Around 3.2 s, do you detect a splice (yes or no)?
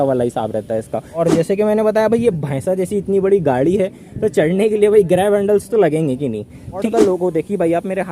no